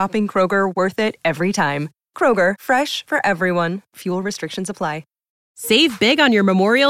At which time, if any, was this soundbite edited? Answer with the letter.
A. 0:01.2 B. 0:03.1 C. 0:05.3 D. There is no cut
C